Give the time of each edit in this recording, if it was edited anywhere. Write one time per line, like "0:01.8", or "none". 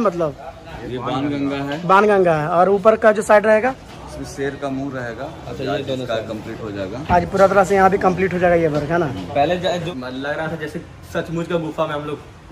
0:09.9